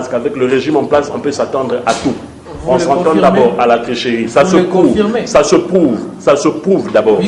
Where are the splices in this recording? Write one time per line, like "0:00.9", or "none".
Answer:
none